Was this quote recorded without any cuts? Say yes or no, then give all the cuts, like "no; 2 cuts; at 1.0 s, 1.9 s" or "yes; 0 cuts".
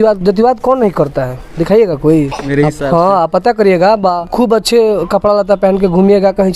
no; 2 cuts; at 2.4 s, 4.2 s